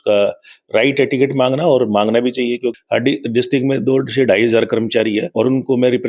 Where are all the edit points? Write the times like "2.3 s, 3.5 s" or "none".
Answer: 2.8 s, 5.3 s